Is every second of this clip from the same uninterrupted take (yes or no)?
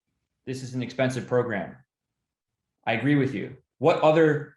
no